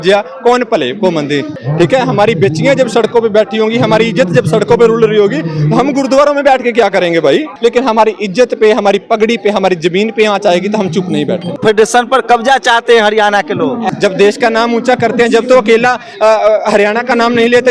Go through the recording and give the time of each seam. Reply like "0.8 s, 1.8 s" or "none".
1.5 s, 7.5 s, 11.5 s, 13.8 s